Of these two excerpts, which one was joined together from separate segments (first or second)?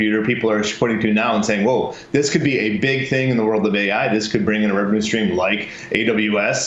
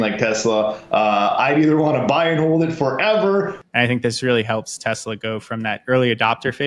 second